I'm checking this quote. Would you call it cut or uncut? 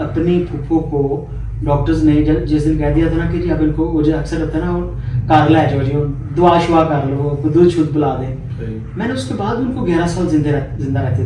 uncut